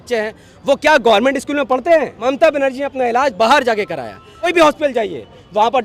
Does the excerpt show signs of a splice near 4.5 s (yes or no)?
yes